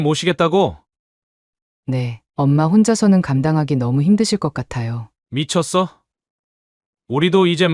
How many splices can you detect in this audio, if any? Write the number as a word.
zero